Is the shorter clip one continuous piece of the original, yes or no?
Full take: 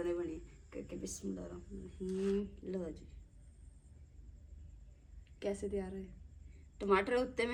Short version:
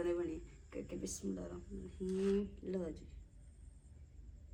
yes